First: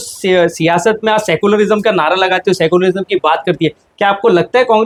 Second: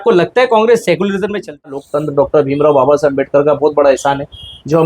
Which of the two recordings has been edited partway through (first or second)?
second